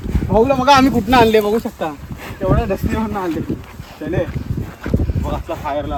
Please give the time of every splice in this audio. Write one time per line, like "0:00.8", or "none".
none